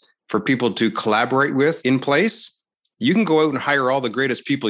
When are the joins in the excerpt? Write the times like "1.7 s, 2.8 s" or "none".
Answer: 1.8 s